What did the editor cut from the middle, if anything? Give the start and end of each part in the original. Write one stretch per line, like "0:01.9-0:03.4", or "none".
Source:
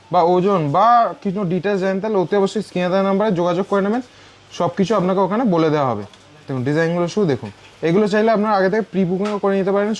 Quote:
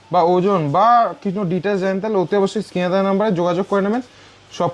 none